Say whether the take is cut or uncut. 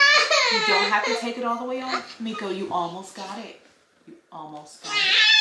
uncut